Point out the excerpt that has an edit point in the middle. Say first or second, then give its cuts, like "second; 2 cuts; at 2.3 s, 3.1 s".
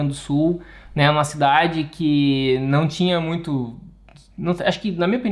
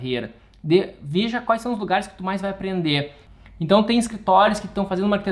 second; 1 cut; at 3.2 s